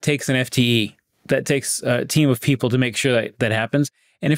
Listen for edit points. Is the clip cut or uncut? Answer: uncut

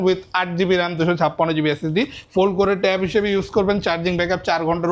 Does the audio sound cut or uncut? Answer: uncut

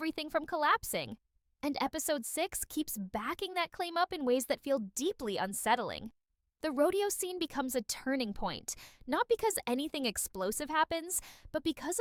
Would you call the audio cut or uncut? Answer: uncut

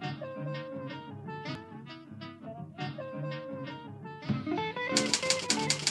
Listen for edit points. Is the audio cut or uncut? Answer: uncut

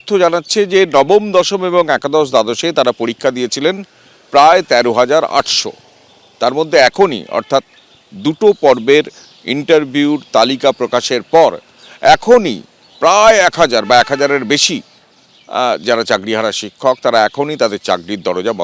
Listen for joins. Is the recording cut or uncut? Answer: uncut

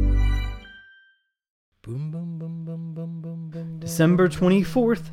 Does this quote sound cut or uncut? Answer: cut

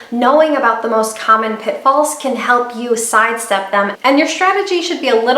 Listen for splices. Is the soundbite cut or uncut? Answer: cut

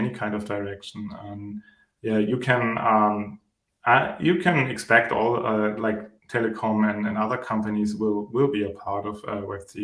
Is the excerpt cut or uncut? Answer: uncut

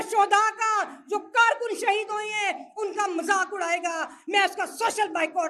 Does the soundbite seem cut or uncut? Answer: uncut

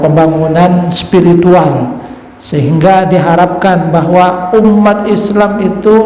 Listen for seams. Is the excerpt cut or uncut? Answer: uncut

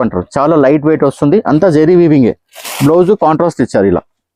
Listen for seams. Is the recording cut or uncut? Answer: uncut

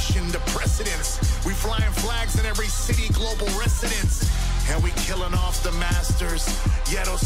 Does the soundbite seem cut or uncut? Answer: uncut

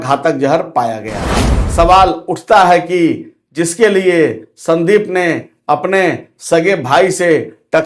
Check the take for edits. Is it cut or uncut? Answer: cut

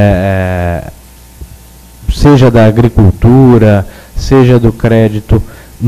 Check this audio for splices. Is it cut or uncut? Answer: cut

